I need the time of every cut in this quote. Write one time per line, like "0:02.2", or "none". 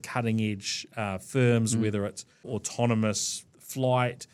none